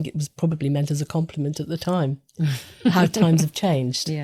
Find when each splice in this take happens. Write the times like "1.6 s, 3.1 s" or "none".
none